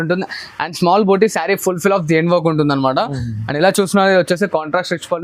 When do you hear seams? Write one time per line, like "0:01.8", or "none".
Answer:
none